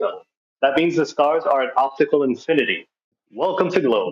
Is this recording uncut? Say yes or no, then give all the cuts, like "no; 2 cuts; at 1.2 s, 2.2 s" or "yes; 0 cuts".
no; 1 cut; at 3.2 s